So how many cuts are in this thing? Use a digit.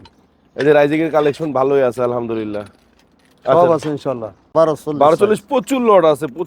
1